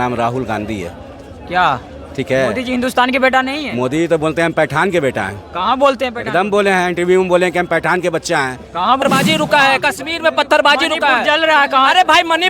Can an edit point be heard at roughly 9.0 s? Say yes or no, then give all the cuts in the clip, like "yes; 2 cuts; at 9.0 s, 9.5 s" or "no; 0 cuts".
yes; 1 cut; at 9.0 s